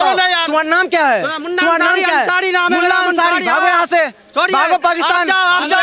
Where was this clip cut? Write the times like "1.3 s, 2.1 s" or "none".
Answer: none